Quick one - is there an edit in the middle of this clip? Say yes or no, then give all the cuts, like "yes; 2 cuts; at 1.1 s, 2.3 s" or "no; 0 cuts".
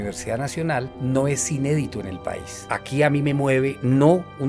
yes; 2 cuts; at 0.9 s, 2.6 s